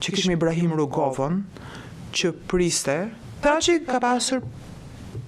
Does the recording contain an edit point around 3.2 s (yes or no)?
yes